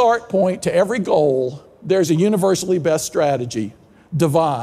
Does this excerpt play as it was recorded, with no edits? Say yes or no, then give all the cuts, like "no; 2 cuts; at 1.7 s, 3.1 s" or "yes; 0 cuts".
yes; 0 cuts